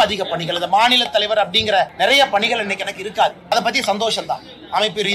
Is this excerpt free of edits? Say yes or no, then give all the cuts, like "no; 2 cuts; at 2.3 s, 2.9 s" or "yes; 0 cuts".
no; 2 cuts; at 1.9 s, 3.5 s